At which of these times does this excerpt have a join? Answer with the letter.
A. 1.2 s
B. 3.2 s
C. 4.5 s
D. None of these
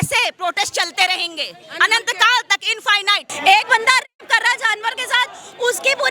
B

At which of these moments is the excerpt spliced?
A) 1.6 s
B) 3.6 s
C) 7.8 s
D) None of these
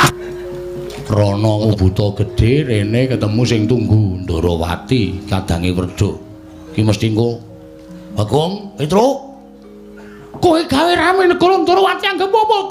A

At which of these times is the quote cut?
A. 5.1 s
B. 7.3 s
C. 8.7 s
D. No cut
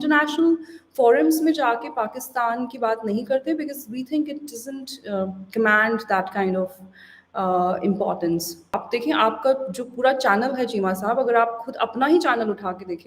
C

